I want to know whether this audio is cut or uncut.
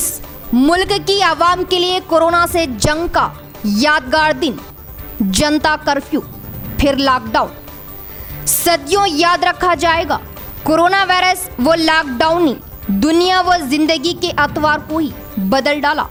uncut